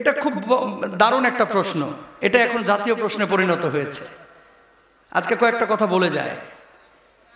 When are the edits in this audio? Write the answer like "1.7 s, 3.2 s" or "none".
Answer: none